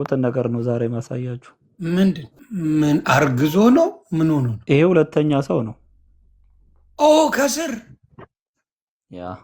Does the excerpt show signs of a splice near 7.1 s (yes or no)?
no